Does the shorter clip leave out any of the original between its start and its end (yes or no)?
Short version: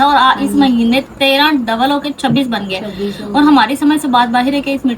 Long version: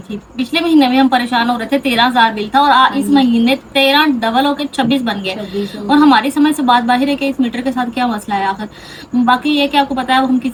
no